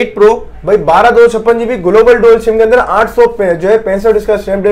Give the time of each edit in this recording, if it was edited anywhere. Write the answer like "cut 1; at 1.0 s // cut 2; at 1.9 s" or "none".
none